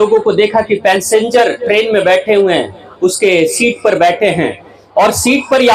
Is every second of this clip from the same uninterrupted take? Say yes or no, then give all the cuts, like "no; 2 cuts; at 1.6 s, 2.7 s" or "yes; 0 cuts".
yes; 0 cuts